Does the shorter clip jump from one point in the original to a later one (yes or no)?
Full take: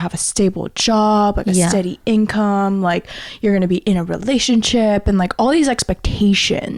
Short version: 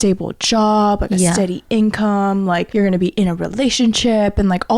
yes